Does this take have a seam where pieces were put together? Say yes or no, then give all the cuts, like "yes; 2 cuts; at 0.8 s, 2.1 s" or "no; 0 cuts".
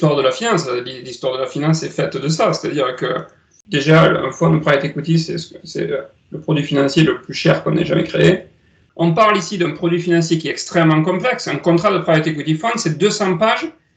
yes; 2 cuts; at 3.6 s, 8.8 s